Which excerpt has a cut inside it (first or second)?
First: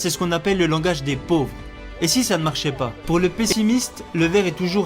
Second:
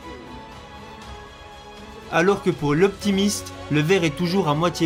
first